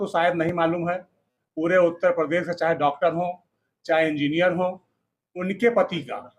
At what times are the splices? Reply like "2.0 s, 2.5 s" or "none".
none